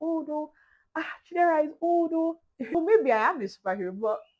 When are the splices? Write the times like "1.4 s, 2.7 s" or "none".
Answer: 2.8 s